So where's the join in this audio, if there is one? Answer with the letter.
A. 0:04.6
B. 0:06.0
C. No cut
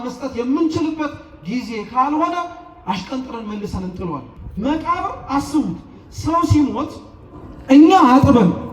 A